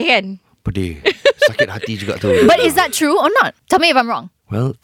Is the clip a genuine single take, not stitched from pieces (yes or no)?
yes